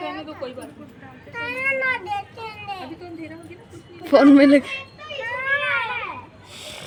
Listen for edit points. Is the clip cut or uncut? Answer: uncut